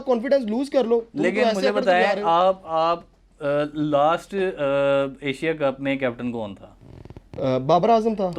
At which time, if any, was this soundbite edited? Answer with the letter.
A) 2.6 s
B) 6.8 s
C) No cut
C